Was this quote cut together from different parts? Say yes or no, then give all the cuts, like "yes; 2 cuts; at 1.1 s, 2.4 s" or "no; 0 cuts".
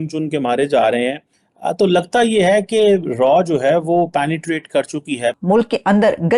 yes; 1 cut; at 5.3 s